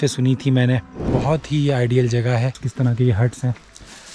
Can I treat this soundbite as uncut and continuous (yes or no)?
no